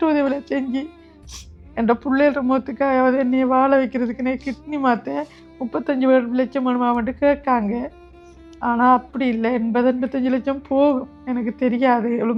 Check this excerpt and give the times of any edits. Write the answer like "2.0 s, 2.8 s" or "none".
none